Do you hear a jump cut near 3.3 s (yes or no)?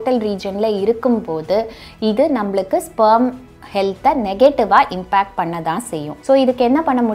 no